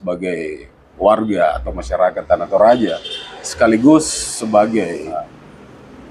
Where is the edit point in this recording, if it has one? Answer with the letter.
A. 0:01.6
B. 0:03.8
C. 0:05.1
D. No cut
C